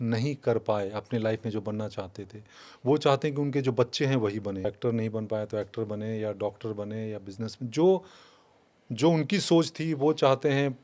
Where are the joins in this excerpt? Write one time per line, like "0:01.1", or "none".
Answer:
0:04.6